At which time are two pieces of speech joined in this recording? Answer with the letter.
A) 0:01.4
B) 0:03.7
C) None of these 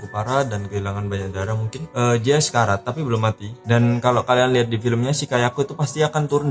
B